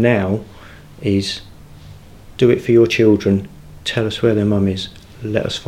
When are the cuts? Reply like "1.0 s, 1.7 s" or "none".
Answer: none